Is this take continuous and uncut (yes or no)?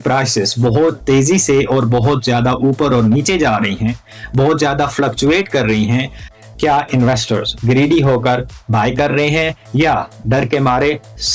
no